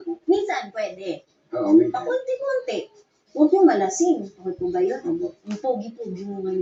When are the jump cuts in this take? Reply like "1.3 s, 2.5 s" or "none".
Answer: none